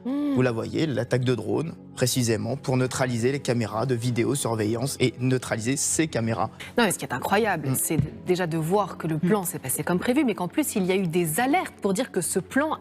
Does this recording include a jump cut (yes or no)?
yes